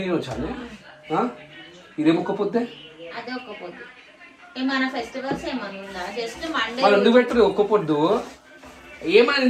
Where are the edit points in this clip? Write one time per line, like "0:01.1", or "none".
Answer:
none